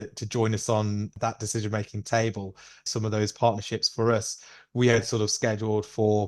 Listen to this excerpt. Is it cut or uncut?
uncut